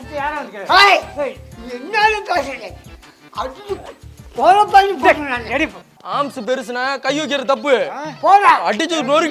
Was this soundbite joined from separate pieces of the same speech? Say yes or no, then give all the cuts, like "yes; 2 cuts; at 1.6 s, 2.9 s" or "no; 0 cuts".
yes; 1 cut; at 5.8 s